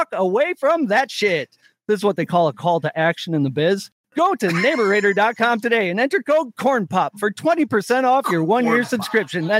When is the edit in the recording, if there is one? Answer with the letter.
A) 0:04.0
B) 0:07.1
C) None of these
A